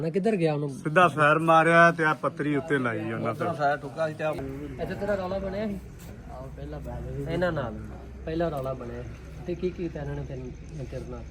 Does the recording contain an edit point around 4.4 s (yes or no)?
yes